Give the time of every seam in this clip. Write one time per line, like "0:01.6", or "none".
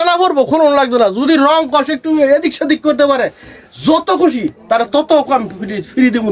none